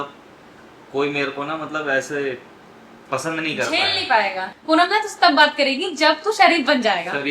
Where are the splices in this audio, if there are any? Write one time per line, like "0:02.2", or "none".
0:04.5